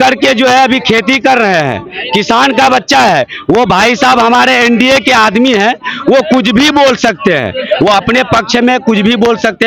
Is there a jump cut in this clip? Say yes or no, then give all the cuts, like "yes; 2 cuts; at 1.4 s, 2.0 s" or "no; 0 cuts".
no; 0 cuts